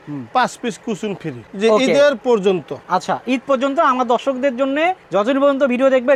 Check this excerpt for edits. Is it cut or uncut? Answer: uncut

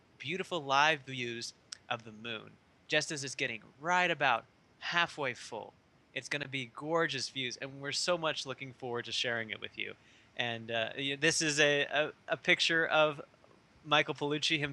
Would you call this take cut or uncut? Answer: cut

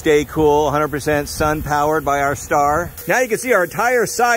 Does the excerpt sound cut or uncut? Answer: cut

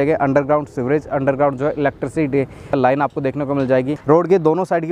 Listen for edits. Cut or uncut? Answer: cut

